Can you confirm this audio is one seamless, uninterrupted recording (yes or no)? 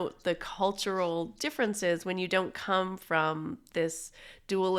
yes